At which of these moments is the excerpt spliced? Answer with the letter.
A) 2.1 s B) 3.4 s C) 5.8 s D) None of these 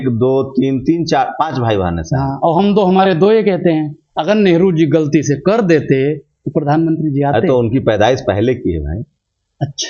D